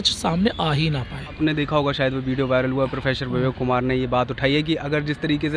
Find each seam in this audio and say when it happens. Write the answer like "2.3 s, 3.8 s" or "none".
1.4 s

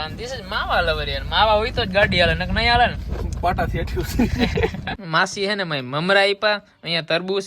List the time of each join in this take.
4.9 s

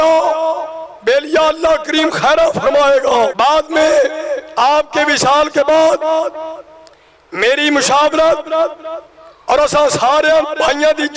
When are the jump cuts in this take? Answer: 9.8 s

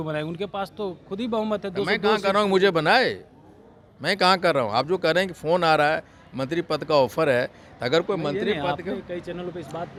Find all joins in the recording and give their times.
none

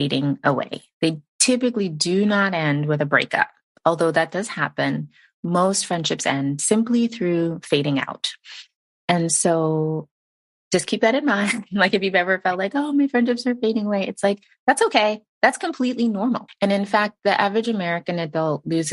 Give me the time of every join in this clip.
16.5 s

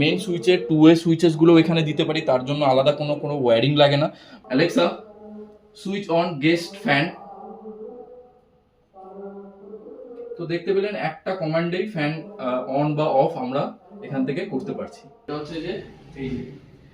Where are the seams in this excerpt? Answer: 4.3 s, 15.3 s

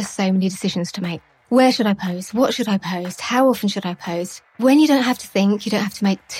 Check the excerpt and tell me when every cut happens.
1.2 s, 4.5 s

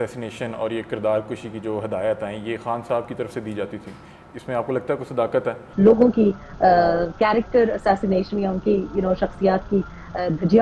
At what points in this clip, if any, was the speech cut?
5.6 s

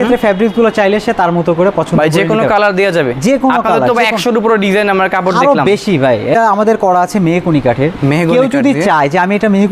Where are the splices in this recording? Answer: 6.3 s

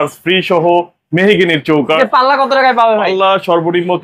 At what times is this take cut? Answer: 2.0 s

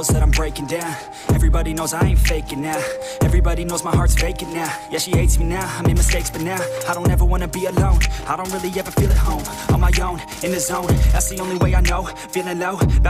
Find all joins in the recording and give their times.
11.6 s

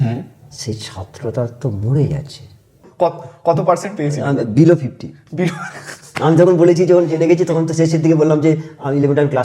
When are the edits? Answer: 2.8 s

